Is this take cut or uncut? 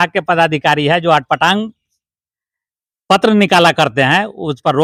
uncut